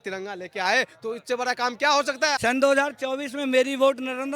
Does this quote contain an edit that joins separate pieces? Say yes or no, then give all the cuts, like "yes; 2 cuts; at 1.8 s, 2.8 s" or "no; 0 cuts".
yes; 1 cut; at 2.4 s